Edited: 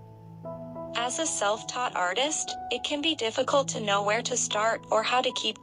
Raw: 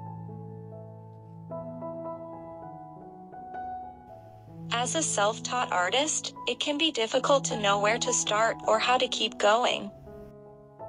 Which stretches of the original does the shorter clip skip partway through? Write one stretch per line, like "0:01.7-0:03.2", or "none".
0:02.0-0:04.7

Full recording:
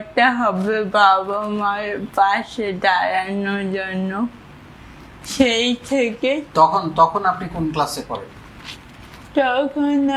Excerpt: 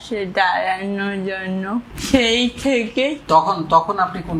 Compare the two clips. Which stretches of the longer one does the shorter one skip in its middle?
0:04.4-0:05.2

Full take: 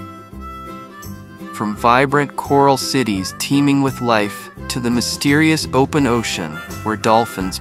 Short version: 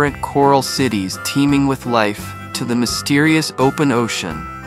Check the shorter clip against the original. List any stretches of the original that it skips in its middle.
none

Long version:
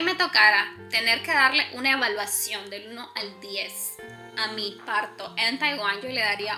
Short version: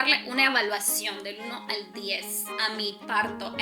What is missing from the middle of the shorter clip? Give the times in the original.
0:03.9-0:04.2

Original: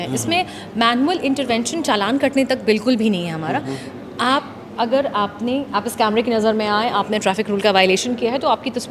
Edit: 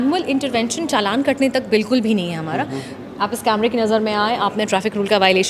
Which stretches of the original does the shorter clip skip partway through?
0:04.1-0:05.7

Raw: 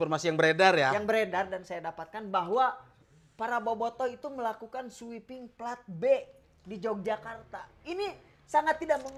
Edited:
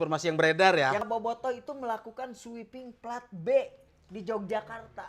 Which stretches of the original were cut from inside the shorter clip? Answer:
0:01.0-0:03.6

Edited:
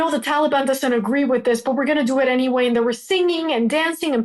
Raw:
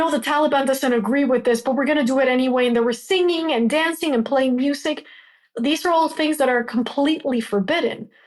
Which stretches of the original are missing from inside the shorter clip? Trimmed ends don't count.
none

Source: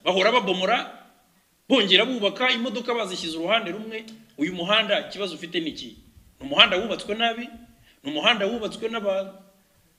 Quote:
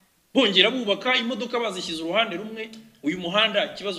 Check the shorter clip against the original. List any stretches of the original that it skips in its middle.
none

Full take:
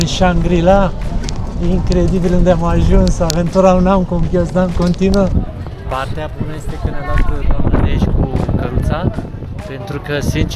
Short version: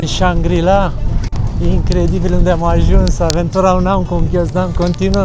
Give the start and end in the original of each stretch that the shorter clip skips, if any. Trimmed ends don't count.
none

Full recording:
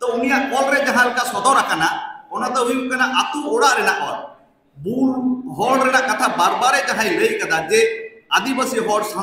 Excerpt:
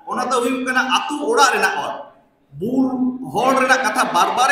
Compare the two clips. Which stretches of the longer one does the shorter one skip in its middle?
none

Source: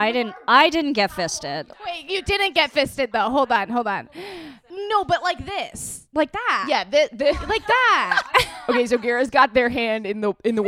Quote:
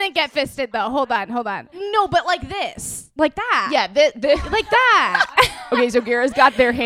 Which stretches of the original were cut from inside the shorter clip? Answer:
0:04.1-0:04.7

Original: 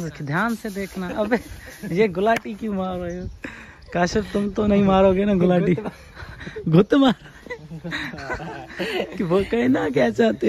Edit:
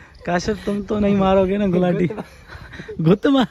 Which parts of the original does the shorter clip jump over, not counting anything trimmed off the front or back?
none

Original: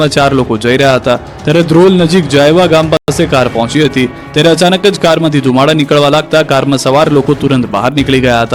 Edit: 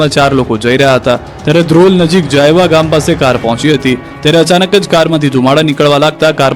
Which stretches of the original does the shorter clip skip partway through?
0:03.0-0:03.1

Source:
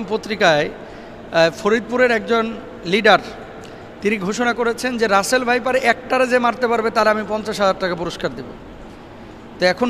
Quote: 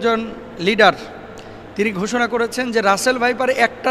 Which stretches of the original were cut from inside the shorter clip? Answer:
none

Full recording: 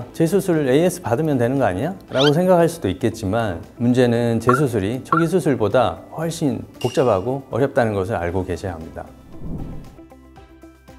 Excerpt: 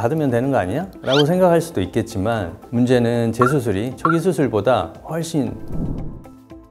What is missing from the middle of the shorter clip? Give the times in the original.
0:06.7-0:09.3

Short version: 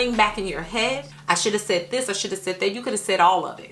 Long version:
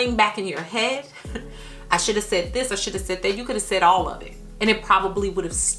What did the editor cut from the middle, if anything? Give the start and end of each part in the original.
0:01.1-0:01.7

